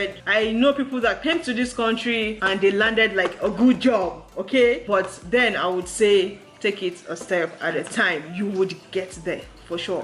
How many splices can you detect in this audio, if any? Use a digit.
0